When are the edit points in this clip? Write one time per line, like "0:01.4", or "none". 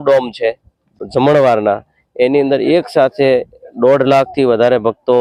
none